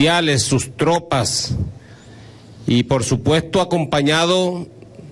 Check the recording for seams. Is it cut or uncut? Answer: cut